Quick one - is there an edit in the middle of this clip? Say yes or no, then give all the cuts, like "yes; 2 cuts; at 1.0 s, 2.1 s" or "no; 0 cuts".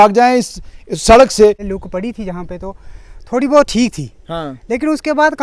yes; 1 cut; at 1.6 s